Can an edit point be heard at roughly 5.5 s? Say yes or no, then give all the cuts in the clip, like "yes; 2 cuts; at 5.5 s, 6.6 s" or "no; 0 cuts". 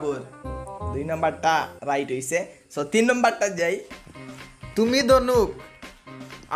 no; 1 cut; at 3.9 s